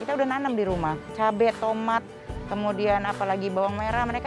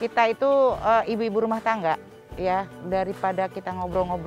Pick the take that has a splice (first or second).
first